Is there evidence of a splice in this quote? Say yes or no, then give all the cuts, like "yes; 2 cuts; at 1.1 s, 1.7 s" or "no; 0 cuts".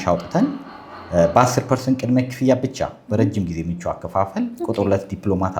no; 0 cuts